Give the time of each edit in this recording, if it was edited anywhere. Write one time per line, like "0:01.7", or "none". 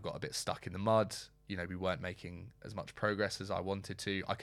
none